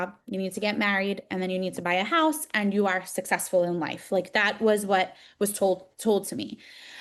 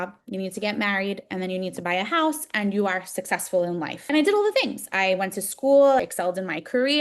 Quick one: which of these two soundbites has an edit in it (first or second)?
second